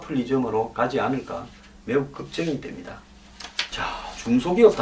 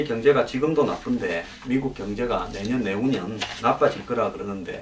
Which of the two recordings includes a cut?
second; 1 cut; at 1.6 s

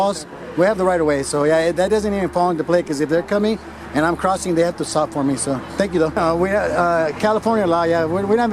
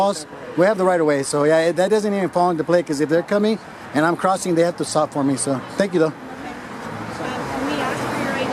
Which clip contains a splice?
first; 1 cut; at 6.2 s

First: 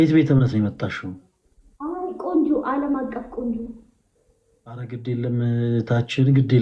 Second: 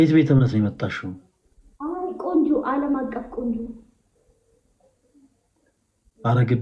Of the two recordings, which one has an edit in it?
first; 1 cut; at 4.8 s

